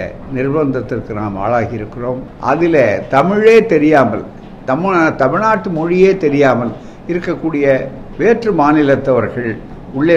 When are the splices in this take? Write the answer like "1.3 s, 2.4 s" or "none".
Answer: 2.3 s